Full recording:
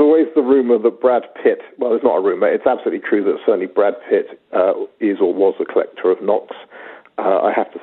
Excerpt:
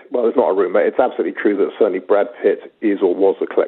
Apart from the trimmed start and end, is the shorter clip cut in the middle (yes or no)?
yes